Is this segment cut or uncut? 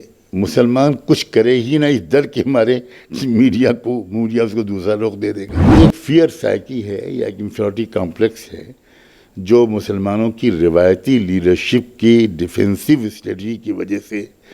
cut